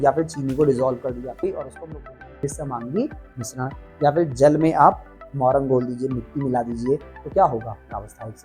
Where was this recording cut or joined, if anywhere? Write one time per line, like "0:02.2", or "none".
0:01.4